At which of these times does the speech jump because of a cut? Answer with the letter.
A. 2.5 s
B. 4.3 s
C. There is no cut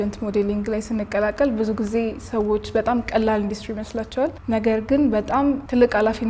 C